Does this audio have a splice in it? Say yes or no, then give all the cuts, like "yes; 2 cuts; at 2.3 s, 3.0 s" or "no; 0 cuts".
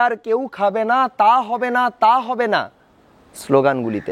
no; 0 cuts